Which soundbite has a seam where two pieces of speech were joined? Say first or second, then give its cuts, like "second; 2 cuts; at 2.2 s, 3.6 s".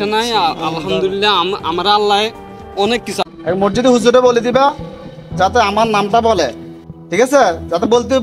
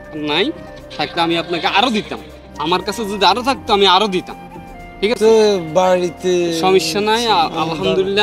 first; 1 cut; at 3.2 s